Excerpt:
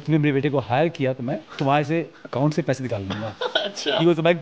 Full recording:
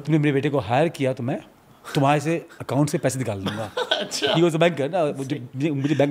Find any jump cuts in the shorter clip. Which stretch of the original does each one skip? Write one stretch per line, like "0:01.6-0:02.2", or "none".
0:01.5-0:01.8

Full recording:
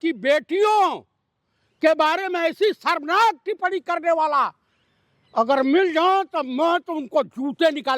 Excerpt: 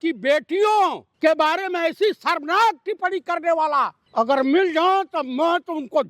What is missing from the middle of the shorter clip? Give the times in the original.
0:01.1-0:01.7
0:04.6-0:05.2

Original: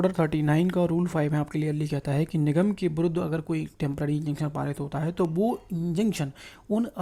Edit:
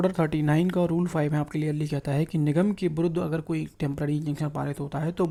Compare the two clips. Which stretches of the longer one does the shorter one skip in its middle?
none

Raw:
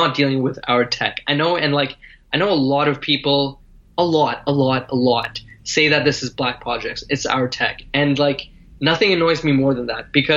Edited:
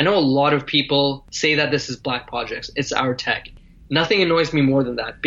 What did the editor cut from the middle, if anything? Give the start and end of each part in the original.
0:03.6-0:05.6
0:07.9-0:08.4

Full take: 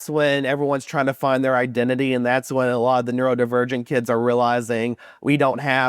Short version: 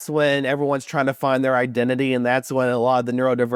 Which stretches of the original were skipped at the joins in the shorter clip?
none

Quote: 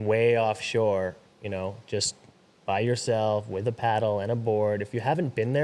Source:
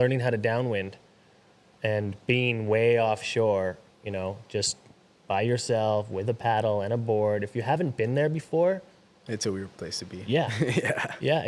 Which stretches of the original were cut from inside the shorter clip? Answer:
none

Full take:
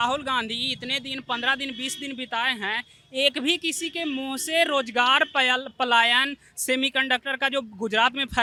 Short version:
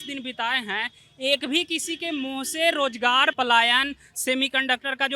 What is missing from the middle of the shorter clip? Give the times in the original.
0:05.3-0:05.7

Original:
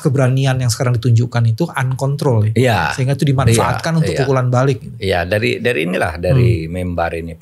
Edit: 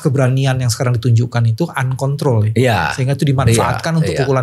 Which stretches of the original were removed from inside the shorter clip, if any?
none

